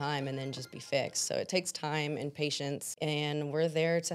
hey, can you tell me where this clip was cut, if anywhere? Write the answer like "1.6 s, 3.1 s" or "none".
2.9 s